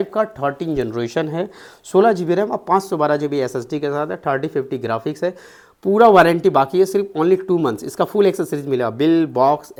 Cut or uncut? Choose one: uncut